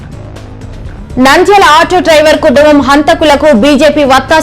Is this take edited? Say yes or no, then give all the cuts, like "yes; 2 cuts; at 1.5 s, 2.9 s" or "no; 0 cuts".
yes; 1 cut; at 1.1 s